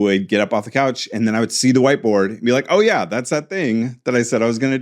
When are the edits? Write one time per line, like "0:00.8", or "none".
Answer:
none

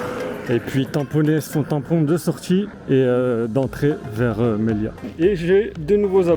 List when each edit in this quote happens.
0:01.5
0:02.8
0:05.0

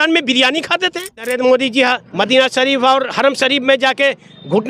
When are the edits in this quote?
0:01.3

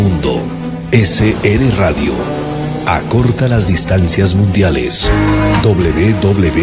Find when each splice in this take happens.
none

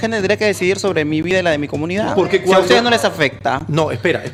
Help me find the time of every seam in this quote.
none

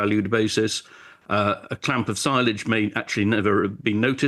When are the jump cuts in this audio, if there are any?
none

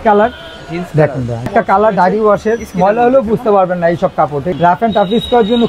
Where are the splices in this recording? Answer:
0:01.5
0:04.4

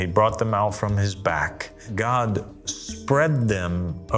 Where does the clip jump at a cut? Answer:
0:01.9

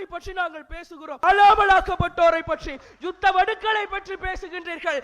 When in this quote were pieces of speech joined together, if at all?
0:01.2

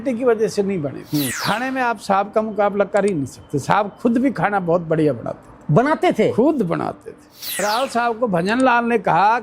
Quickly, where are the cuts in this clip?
0:01.3
0:07.6

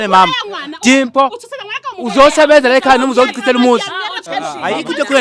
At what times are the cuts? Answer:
0:04.2

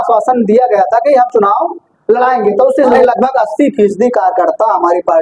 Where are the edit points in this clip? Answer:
0:02.9

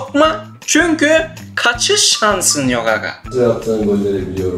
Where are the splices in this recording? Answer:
0:03.2

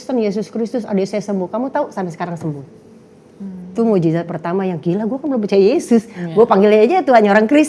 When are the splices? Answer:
none

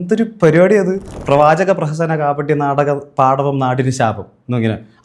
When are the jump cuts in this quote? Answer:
0:01.1

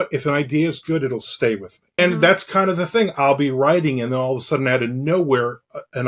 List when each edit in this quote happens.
0:01.8

